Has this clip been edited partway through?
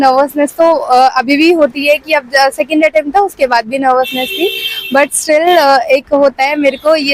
no; 0 cuts

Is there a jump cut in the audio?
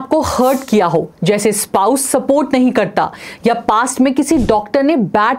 no; 0 cuts

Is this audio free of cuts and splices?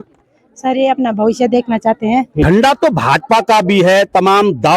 no; 1 cut; at 2.4 s

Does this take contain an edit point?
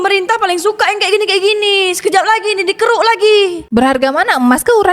yes; 1 cut; at 3.6 s

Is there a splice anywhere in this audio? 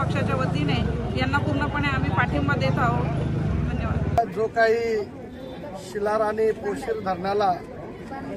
no; 0 cuts

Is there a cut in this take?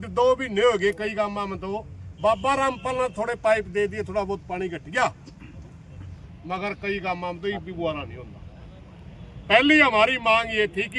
no; 0 cuts

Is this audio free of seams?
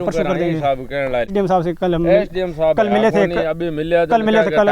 no; 1 cut; at 1.3 s

